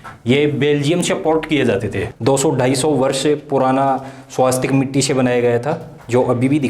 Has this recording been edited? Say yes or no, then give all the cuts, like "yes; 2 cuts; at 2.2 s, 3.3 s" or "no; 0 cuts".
yes; 1 cut; at 2.1 s